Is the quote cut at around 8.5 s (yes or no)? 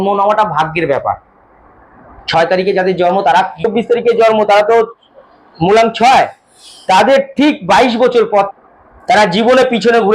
yes